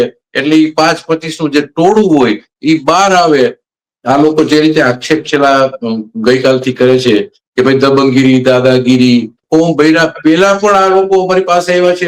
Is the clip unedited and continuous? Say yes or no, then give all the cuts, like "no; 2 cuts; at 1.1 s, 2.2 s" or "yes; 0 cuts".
no; 2 cuts; at 3.7 s, 9.4 s